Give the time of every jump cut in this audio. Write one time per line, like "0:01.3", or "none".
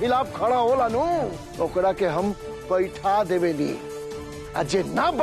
0:01.4